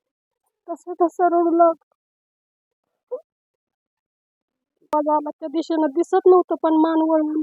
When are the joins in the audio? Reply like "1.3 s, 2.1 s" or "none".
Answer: 4.9 s